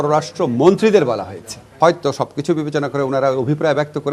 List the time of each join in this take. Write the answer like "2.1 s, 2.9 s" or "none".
1.7 s